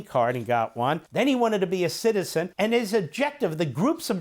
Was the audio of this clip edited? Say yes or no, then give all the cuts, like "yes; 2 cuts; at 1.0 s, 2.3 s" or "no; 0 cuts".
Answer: yes; 2 cuts; at 1.0 s, 2.5 s